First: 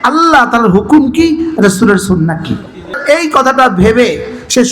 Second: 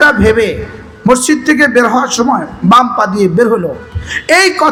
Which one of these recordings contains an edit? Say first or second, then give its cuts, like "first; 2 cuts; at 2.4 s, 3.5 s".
first; 1 cut; at 3.0 s